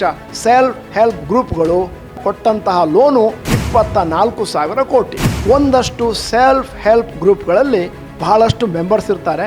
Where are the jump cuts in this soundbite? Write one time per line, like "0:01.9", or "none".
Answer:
0:02.2
0:03.4
0:05.2